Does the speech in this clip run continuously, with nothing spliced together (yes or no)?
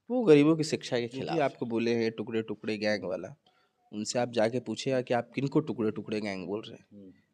no